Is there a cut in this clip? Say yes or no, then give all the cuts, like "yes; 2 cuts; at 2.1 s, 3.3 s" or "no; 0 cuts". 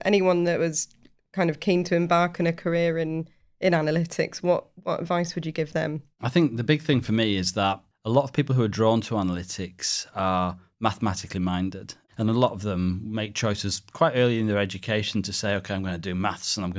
no; 0 cuts